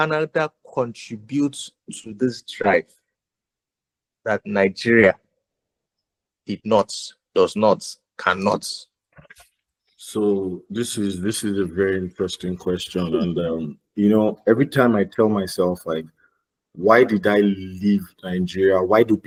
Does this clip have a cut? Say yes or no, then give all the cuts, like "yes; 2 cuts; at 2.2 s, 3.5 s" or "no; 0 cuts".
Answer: no; 0 cuts